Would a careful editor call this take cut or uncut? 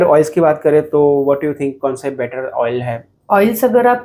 uncut